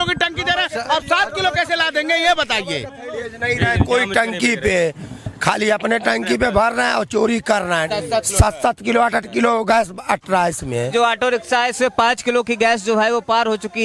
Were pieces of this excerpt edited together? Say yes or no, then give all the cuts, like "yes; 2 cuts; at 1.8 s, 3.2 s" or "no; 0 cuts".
yes; 3 cuts; at 3.1 s, 7.9 s, 10.9 s